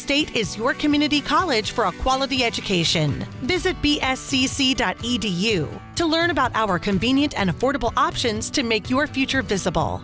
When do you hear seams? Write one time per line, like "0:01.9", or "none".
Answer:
none